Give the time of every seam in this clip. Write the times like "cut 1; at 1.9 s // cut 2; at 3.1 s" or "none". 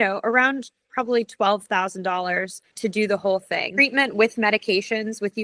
cut 1; at 2.6 s // cut 2; at 3.6 s